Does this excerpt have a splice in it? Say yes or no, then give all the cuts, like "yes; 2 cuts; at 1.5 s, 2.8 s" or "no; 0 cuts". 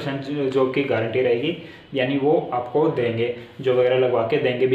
no; 0 cuts